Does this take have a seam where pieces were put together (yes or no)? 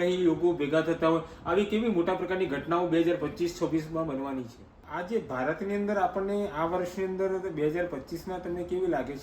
yes